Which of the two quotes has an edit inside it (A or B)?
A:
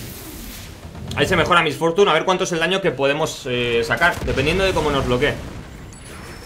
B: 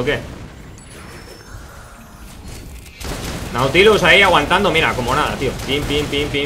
B